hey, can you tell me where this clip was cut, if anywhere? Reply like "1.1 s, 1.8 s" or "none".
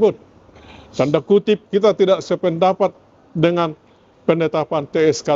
none